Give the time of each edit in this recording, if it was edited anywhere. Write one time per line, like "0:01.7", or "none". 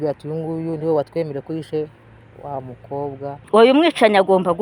0:03.4